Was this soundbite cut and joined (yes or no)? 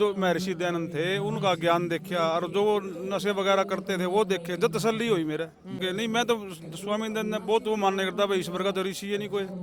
yes